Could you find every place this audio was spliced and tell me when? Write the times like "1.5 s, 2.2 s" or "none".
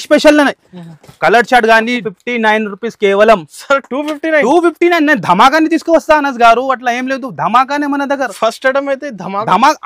2.0 s